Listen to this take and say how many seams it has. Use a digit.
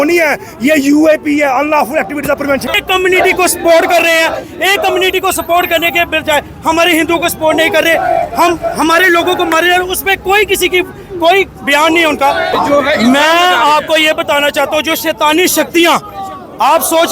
2